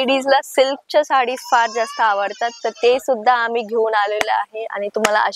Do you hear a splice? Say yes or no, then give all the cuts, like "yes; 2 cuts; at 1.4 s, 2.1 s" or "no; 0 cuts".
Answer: no; 0 cuts